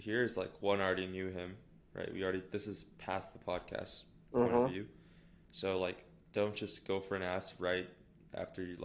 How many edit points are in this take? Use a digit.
0